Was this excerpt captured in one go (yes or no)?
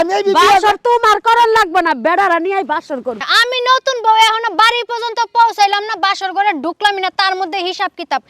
no